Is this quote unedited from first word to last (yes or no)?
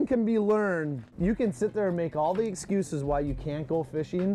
no